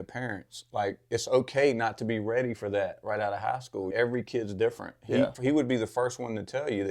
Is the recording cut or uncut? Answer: cut